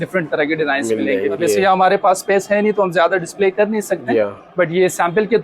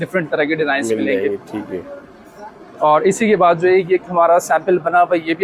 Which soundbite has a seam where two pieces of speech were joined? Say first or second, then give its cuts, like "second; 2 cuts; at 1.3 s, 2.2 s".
first; 1 cut; at 1.4 s